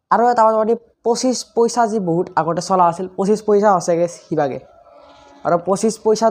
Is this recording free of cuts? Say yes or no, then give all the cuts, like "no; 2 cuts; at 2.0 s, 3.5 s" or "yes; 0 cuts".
yes; 0 cuts